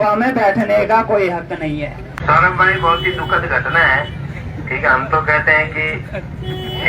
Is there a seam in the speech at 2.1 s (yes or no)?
yes